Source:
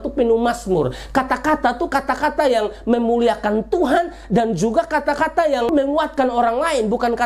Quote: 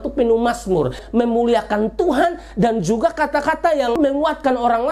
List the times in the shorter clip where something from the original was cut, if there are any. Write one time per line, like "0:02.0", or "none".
0:01.0